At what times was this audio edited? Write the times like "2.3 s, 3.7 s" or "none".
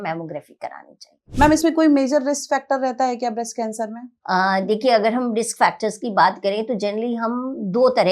1.2 s, 4.1 s